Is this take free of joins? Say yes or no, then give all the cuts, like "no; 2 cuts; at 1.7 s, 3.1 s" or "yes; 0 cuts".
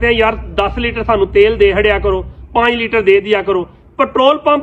yes; 0 cuts